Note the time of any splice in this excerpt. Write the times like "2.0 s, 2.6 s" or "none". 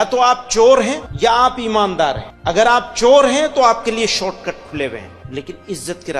1.0 s, 2.3 s, 5.2 s